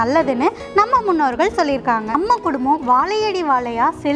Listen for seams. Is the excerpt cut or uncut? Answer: cut